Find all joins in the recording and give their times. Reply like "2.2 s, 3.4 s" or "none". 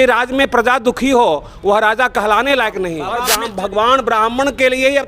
3.1 s